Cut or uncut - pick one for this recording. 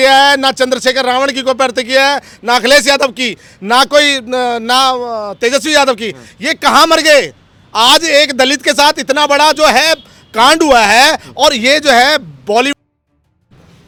uncut